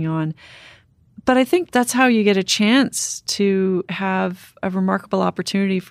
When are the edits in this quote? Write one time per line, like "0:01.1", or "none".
0:01.7
0:04.5